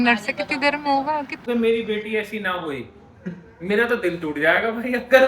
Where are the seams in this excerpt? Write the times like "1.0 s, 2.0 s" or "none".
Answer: 1.5 s